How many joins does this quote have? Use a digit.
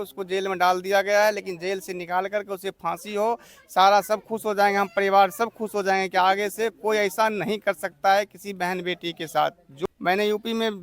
1